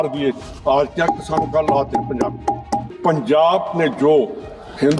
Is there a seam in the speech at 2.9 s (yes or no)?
yes